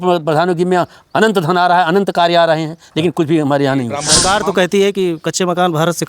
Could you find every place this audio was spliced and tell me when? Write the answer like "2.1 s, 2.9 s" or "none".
4.1 s